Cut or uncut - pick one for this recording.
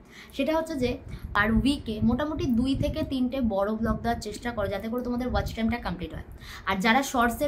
cut